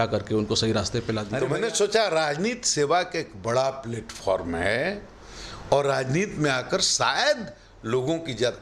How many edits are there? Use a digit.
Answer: 1